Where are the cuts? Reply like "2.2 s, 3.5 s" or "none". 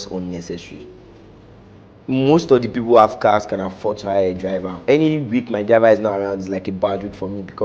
4.8 s